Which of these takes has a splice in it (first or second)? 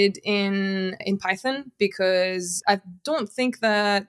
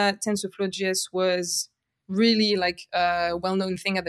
first